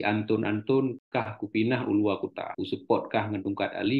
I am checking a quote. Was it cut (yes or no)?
yes